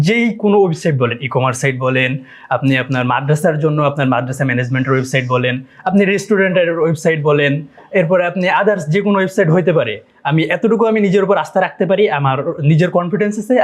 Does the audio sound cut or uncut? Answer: uncut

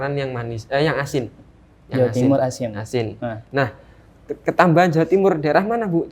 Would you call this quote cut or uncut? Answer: uncut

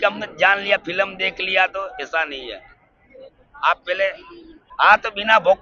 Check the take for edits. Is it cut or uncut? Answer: cut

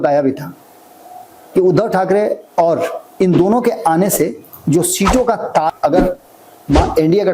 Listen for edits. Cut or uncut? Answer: cut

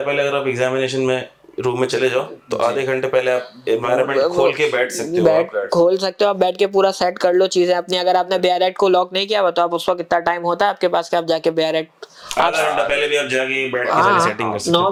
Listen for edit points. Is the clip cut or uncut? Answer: uncut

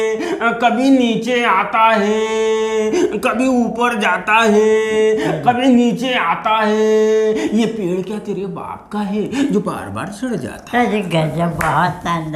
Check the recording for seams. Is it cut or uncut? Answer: uncut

